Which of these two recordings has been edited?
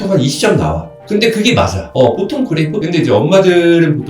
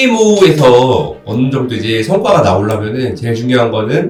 first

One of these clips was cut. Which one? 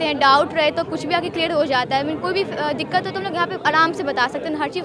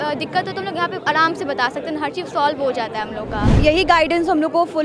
second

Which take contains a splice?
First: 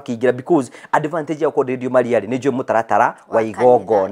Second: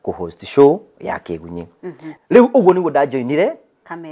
second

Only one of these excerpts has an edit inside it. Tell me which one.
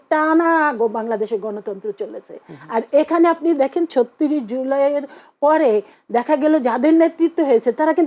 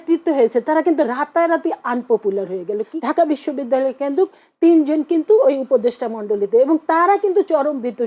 second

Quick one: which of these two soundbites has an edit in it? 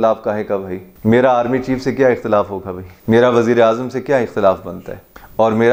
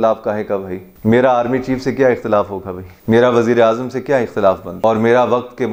second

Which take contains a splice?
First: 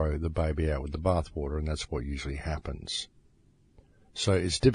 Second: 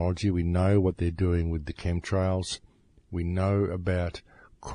first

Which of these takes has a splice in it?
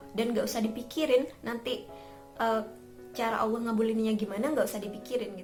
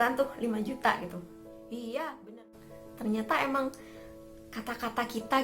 second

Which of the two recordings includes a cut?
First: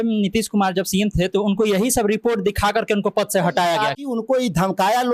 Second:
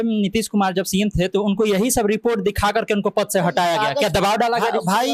first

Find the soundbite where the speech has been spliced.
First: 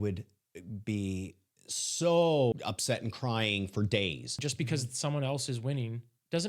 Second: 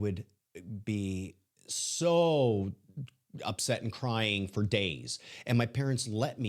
first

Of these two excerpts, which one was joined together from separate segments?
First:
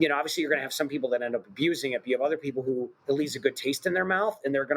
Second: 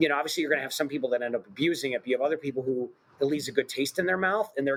first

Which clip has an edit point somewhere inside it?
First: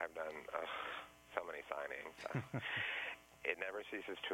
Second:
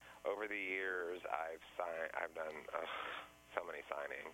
first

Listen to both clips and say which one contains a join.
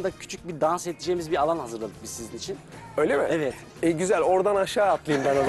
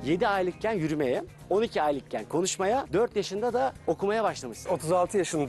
second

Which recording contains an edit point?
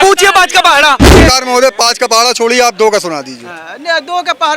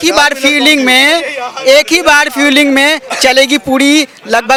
first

